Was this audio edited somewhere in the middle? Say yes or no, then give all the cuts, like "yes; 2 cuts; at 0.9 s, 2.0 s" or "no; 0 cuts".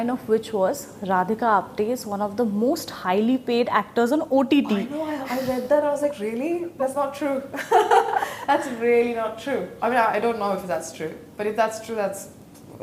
no; 0 cuts